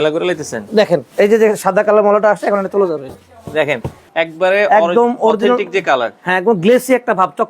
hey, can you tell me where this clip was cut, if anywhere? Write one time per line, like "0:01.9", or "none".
0:01.1
0:03.9